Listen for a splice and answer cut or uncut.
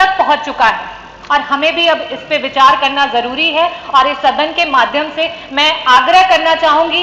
uncut